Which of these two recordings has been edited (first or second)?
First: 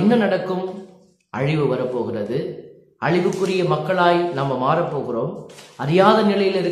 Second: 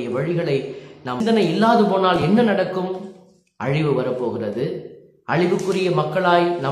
second